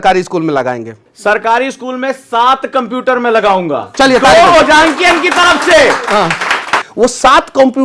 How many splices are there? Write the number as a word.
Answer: two